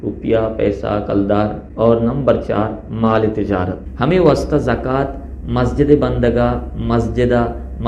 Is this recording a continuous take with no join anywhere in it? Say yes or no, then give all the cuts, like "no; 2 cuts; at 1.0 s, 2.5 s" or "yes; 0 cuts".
no; 2 cuts; at 1.6 s, 3.9 s